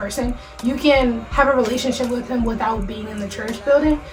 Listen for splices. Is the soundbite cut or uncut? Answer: uncut